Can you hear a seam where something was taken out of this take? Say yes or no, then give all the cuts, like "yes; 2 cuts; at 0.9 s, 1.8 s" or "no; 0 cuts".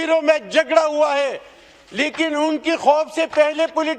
no; 0 cuts